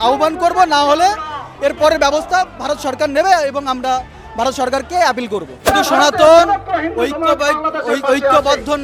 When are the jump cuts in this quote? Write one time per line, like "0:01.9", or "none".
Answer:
0:05.7